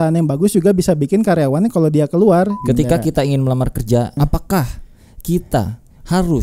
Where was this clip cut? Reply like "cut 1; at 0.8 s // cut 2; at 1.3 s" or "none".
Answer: cut 1; at 2.6 s // cut 2; at 4.2 s